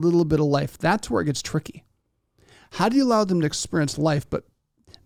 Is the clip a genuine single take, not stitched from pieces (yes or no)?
yes